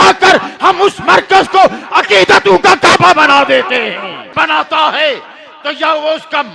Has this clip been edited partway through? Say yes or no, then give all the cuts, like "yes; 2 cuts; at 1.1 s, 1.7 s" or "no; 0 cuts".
yes; 1 cut; at 4.3 s